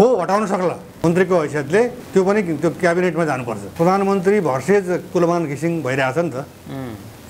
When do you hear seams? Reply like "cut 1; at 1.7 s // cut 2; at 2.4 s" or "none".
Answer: cut 1; at 0.9 s // cut 2; at 2.0 s // cut 3; at 3.6 s

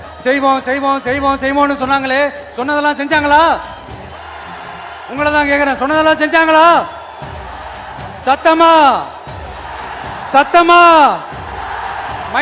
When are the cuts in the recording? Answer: none

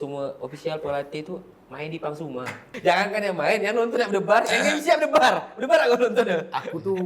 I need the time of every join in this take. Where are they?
cut 1; at 2.7 s

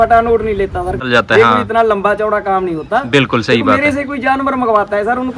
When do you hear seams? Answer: cut 1; at 1.0 s

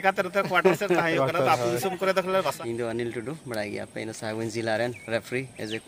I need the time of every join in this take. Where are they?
cut 1; at 2.6 s

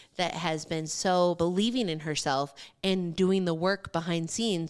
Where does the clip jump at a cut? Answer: cut 1; at 1.4 s

